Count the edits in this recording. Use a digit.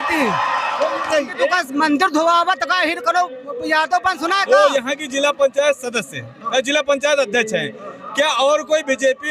2